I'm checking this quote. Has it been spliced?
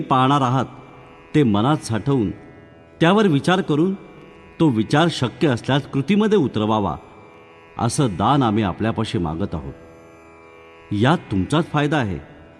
no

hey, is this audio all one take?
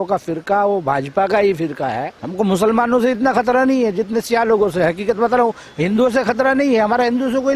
no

